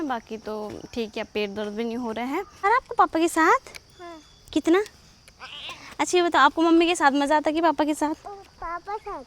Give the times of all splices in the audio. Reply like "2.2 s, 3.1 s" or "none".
2.6 s